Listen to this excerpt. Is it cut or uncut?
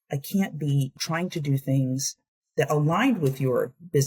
cut